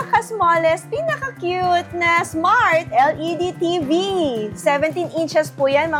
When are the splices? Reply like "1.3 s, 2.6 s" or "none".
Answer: none